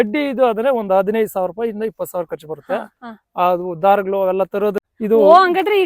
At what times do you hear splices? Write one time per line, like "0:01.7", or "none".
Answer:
0:04.8